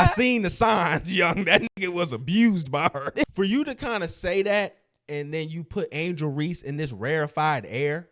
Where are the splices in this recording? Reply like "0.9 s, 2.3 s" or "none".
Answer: 3.3 s

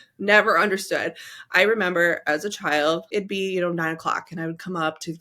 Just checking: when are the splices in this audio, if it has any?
3.1 s

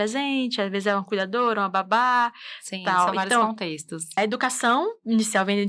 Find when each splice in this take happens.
4.2 s

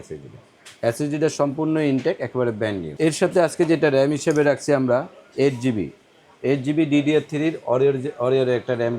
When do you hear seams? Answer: 2.8 s

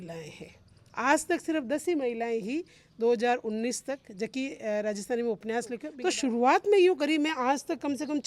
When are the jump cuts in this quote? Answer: 5.9 s

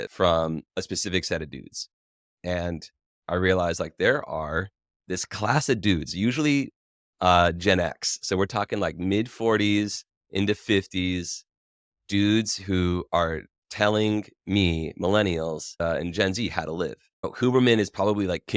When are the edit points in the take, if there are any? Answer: none

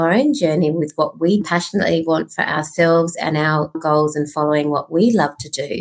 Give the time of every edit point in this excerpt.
1.4 s

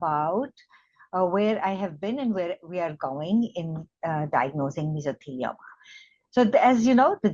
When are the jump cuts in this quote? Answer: 3.1 s

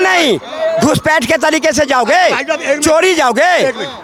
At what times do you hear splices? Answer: none

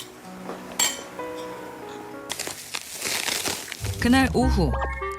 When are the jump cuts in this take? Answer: 2.3 s

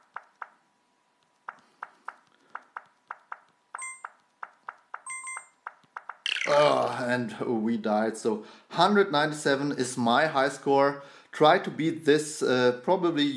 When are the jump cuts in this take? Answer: none

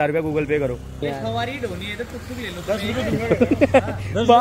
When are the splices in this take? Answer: 1.1 s

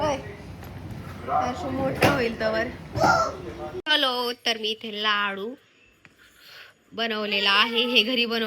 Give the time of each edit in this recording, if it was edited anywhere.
3.8 s

